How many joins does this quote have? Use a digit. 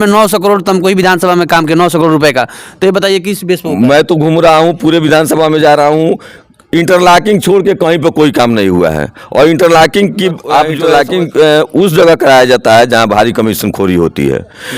1